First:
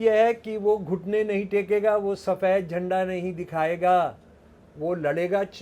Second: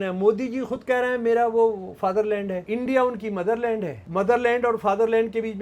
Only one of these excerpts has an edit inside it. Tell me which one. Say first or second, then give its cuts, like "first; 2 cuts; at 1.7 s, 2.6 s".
second; 2 cuts; at 2.6 s, 4.0 s